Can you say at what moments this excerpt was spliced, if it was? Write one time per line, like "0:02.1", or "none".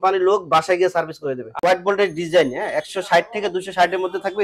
0:01.6